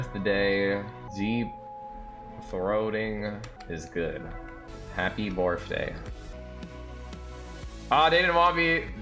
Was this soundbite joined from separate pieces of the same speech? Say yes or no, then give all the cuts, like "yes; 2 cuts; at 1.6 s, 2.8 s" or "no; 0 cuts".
yes; 4 cuts; at 1.0 s, 3.5 s, 4.6 s, 6.3 s